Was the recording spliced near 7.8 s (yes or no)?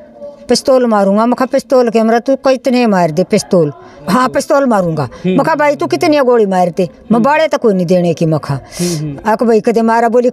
no